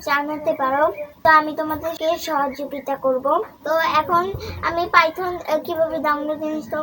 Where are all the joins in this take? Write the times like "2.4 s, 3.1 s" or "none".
none